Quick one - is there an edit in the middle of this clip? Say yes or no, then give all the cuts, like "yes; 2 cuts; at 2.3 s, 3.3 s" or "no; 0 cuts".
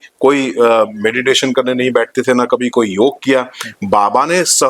no; 0 cuts